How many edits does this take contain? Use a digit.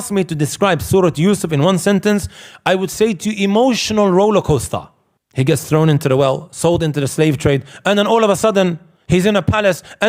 0